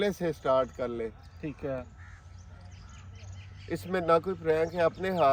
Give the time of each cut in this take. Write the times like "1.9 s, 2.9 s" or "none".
none